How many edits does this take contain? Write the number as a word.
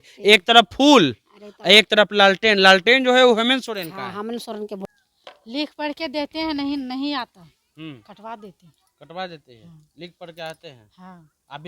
one